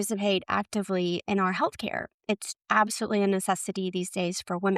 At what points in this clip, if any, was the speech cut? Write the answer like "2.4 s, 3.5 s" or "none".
2.5 s